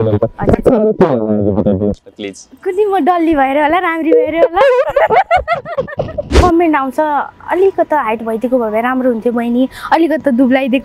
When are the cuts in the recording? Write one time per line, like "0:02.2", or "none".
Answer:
0:06.2